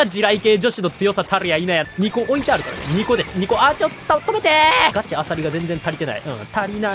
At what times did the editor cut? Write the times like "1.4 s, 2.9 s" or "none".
1.9 s, 4.9 s